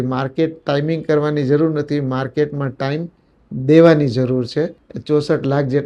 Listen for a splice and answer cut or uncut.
cut